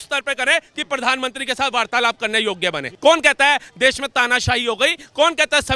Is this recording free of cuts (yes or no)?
no